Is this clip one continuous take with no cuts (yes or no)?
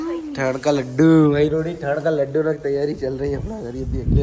yes